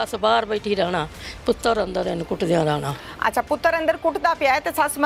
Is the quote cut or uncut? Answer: uncut